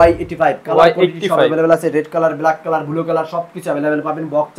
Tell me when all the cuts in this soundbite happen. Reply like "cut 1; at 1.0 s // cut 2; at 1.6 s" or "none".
none